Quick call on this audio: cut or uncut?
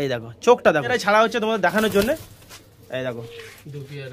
cut